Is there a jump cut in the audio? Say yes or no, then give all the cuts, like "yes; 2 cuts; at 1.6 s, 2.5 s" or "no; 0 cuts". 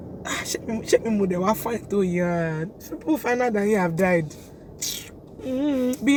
no; 0 cuts